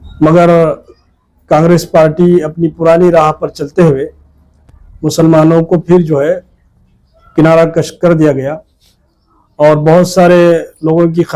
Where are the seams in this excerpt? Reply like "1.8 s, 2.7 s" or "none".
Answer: none

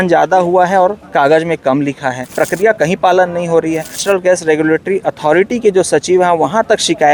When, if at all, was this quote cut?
2.2 s, 4.0 s

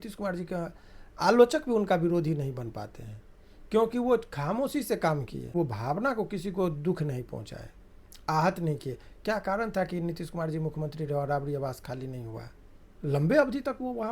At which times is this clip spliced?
5.5 s

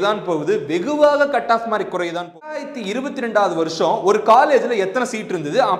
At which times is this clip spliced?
2.7 s

